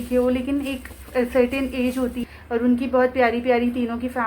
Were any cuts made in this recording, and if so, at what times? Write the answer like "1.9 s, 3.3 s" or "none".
2.3 s